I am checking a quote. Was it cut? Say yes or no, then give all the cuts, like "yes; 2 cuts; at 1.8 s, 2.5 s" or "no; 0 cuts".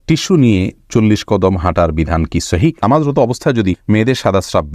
yes; 2 cuts; at 2.8 s, 3.8 s